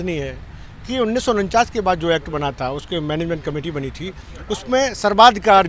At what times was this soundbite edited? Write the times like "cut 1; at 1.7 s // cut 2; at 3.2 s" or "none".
none